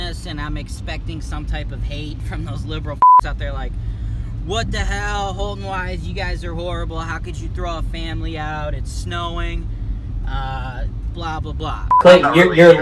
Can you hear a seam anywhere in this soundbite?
yes; 1 cut; at 11.9 s

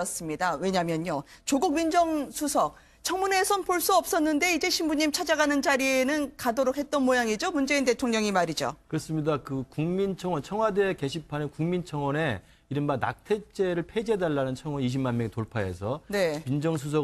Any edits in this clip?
yes; 1 cut; at 14.7 s

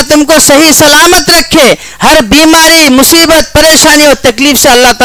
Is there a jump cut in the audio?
no; 0 cuts

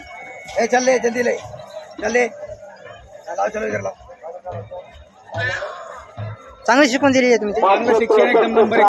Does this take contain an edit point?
yes; 1 cut; at 7.4 s

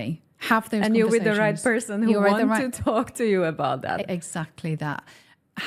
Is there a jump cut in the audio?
no; 0 cuts

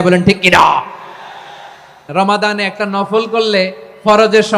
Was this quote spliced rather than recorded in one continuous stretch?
yes; 1 cut; at 2.1 s

